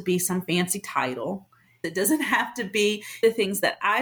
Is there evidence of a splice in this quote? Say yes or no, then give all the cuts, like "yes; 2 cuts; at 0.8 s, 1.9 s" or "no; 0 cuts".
yes; 2 cuts; at 1.8 s, 3.2 s